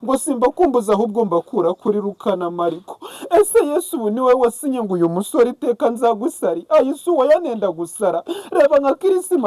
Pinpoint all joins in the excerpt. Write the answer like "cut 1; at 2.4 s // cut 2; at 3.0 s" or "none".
none